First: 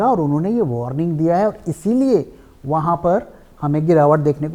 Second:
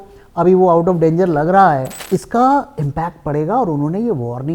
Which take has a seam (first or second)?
second